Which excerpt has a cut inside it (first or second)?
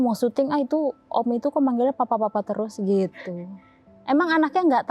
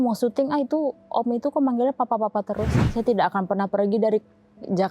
second